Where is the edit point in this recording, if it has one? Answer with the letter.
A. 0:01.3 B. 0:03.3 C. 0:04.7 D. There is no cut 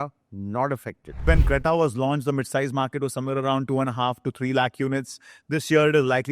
A